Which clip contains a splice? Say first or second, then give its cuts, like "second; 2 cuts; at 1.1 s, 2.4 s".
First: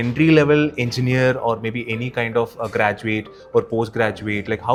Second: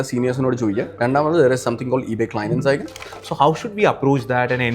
second; 2 cuts; at 0.9 s, 3.0 s